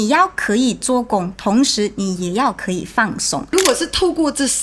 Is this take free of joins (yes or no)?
no